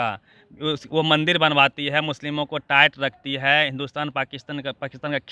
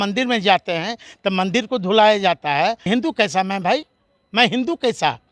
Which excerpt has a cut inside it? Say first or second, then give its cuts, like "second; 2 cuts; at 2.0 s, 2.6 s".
second; 1 cut; at 2.9 s